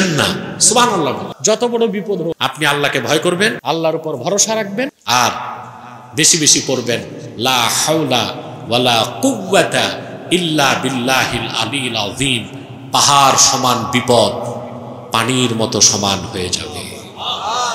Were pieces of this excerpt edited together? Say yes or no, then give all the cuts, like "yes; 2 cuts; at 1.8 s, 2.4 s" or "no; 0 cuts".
yes; 4 cuts; at 1.3 s, 2.4 s, 3.6 s, 5.0 s